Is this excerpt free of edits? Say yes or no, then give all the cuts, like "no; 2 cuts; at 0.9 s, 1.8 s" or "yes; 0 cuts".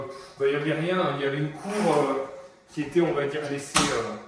yes; 0 cuts